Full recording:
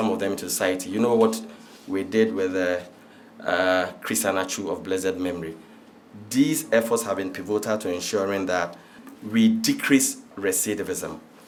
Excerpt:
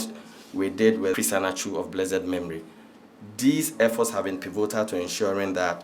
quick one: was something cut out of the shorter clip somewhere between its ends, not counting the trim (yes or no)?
yes